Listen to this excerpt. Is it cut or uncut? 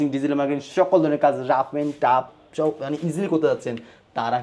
uncut